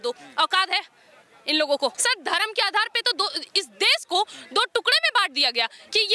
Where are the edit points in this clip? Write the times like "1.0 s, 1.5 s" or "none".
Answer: 2.0 s